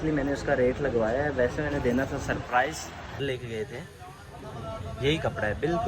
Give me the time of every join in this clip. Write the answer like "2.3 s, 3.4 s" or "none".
3.2 s

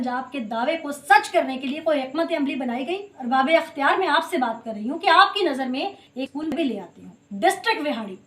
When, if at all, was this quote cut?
3.1 s, 7.3 s

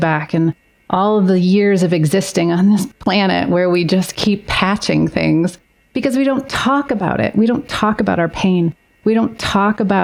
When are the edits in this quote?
none

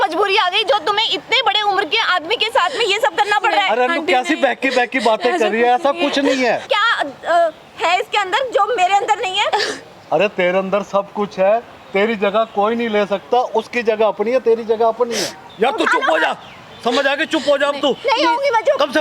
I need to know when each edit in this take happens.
6.7 s, 15.5 s

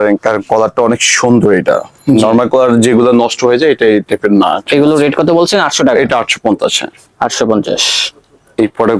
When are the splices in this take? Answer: none

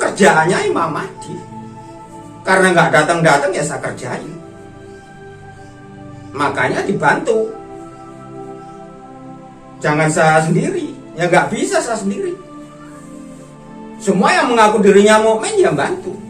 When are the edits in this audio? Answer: 8.2 s, 9.8 s, 12.5 s, 14.0 s

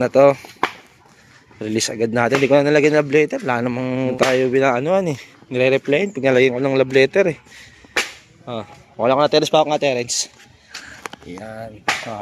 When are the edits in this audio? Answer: none

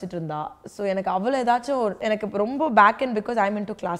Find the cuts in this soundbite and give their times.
2.0 s

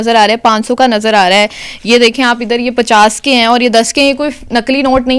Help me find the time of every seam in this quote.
none

